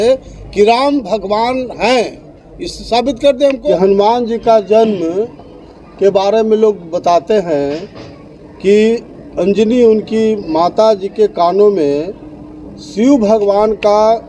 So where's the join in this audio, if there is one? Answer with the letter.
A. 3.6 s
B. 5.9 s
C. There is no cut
A